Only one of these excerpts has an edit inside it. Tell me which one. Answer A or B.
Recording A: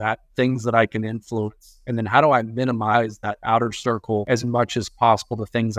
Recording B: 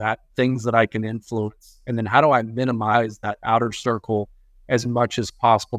A